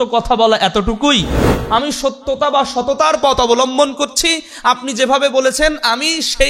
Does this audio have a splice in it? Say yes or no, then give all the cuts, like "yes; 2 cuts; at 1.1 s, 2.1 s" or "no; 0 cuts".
yes; 1 cut; at 1.6 s